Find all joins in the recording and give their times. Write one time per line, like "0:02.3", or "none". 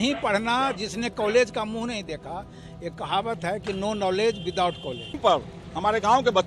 0:05.1